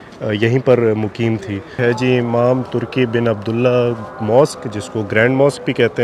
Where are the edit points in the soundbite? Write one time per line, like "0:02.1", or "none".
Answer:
0:01.8